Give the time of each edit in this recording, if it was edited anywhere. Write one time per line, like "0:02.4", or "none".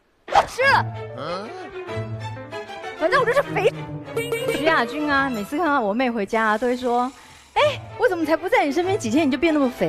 none